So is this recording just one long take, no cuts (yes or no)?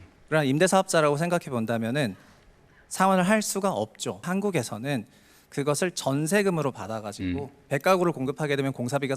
no